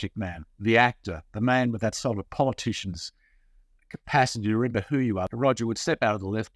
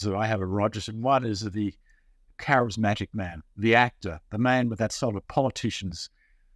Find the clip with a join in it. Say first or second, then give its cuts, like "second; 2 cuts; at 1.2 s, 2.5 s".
first; 1 cut; at 5.2 s